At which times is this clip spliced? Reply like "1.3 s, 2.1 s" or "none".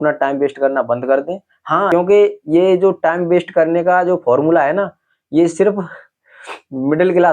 1.9 s